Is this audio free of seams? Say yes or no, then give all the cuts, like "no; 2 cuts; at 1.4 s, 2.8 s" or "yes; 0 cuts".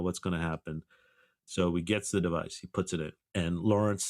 no; 1 cut; at 1.3 s